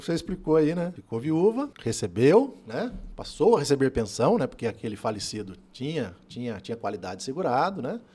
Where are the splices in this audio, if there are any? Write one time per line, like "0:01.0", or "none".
0:01.0
0:01.8